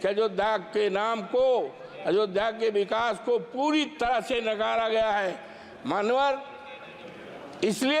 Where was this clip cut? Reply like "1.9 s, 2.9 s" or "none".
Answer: none